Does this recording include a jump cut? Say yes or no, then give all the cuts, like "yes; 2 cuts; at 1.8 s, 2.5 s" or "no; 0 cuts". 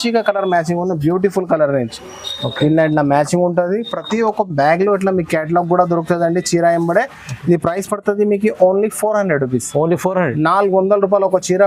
no; 0 cuts